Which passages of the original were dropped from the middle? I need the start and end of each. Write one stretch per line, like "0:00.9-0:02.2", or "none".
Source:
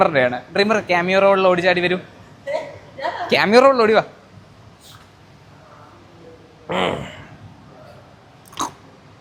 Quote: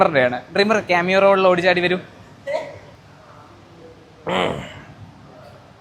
0:02.8-0:05.3